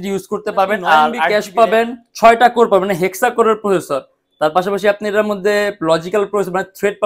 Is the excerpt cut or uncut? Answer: cut